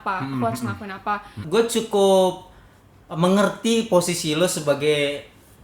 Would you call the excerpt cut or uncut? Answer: cut